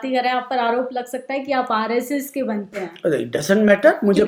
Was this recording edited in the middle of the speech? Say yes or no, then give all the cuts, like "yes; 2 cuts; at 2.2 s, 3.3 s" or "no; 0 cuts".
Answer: no; 0 cuts